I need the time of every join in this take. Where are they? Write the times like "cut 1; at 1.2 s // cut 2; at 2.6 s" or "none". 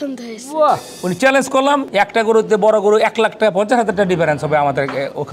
cut 1; at 0.9 s // cut 2; at 1.9 s